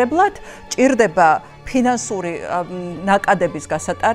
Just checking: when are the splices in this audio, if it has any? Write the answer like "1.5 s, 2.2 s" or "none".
none